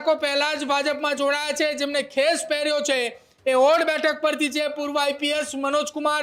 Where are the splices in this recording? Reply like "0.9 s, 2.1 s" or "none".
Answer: none

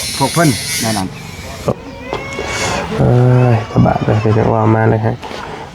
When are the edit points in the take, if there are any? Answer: 1.7 s

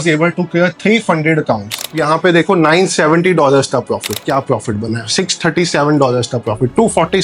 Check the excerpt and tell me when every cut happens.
2.0 s, 4.2 s

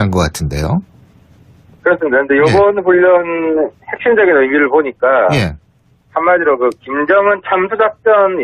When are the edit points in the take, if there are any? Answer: 2.8 s

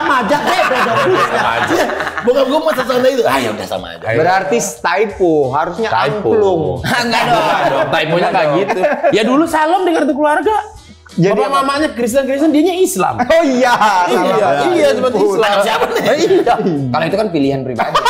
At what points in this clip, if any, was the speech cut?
none

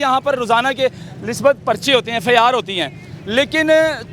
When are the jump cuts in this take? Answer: none

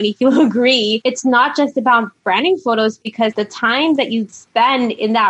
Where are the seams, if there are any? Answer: 1.0 s, 3.2 s

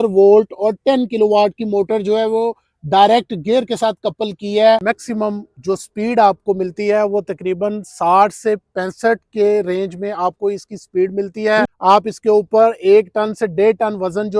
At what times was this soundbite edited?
4.8 s, 11.7 s

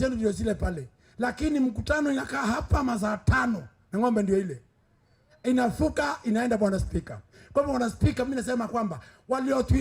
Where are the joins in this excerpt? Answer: none

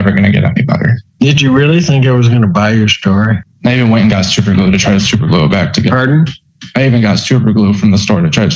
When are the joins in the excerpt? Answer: 1.0 s, 3.5 s

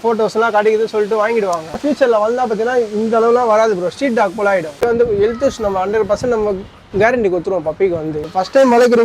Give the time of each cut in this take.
1.8 s, 4.8 s, 8.2 s

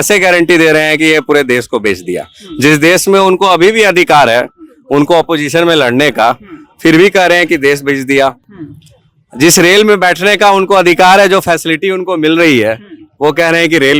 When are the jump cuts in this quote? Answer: none

